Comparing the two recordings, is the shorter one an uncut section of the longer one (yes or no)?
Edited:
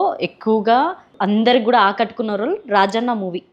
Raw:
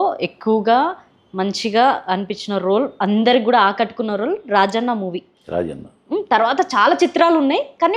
no